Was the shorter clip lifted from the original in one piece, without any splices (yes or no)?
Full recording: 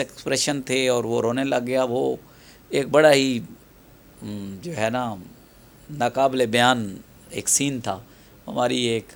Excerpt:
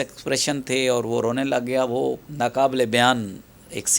no